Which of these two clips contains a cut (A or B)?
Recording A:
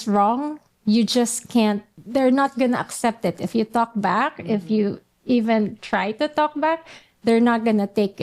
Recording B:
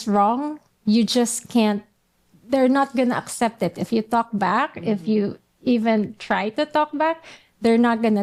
A